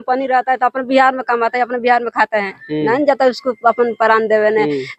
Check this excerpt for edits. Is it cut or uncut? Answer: uncut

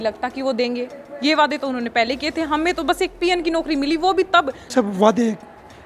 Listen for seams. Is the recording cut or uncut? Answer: cut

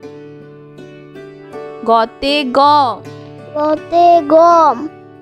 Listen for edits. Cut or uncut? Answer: cut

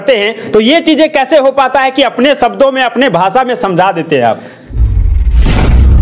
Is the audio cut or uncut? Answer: cut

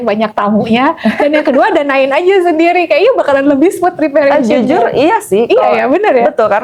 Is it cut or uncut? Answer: uncut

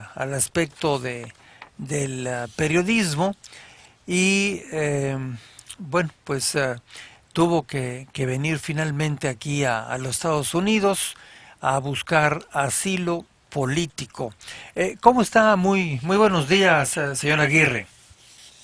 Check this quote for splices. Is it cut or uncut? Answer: cut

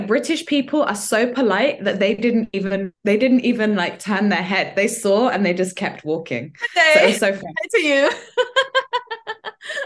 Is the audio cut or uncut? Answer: uncut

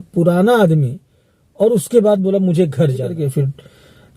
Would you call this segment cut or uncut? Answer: cut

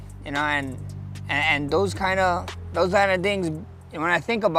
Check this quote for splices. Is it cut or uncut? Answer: uncut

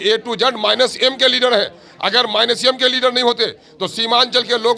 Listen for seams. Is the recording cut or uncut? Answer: uncut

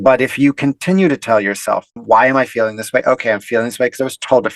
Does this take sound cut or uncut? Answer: cut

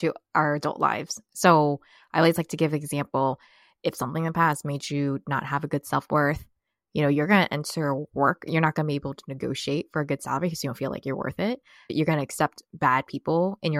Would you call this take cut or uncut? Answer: cut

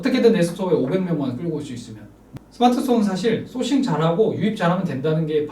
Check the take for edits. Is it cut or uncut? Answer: cut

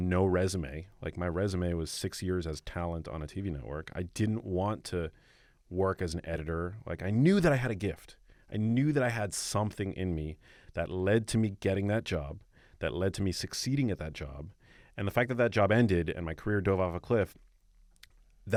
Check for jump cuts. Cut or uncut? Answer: uncut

